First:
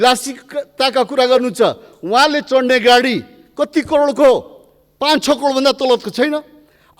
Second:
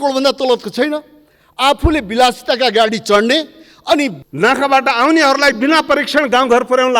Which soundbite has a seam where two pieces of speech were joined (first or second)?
second